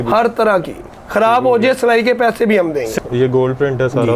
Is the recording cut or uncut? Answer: cut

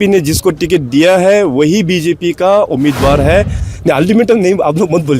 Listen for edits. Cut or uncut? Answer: cut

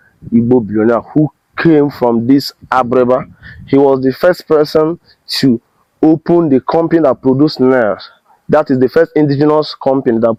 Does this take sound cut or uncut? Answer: uncut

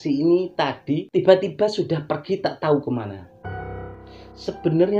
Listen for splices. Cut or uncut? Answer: cut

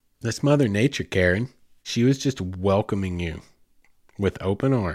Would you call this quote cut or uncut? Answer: cut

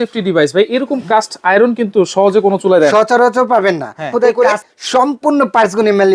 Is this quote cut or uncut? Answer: cut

